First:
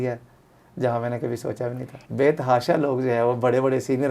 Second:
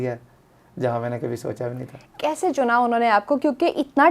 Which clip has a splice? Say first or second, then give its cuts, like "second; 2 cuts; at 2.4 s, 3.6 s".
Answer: first; 1 cut; at 2.1 s